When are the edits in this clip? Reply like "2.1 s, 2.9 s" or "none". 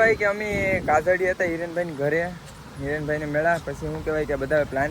none